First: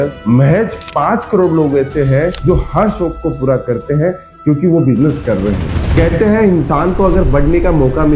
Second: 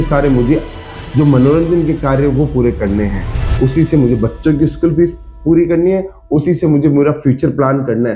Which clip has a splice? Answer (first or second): first